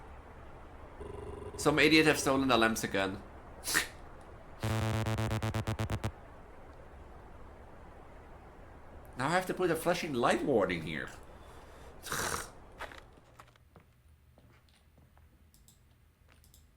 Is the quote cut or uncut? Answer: cut